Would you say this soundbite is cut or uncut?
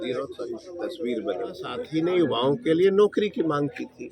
cut